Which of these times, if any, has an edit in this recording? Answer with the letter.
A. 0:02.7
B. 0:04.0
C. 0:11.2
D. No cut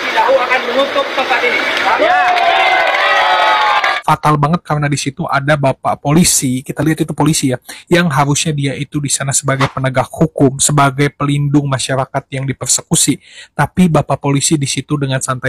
B